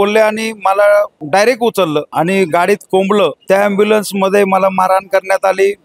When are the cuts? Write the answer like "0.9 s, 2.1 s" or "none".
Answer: 1.2 s, 2.1 s, 3.4 s